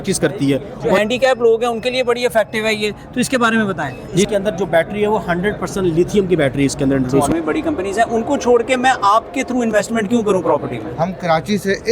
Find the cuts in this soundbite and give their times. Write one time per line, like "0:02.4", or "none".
0:01.0
0:04.3
0:07.3
0:10.8